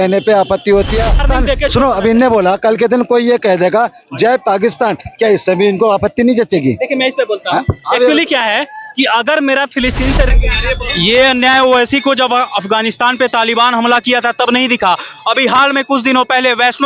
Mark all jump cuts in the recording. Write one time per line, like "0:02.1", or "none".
0:01.3
0:10.3